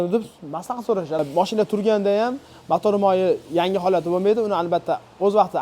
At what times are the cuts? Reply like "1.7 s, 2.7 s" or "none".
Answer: 1.2 s

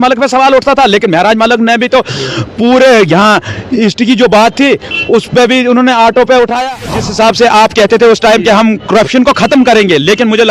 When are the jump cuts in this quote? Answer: 7.0 s

